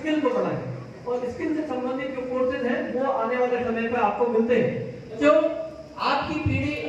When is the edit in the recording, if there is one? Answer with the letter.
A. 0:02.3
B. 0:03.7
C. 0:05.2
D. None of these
C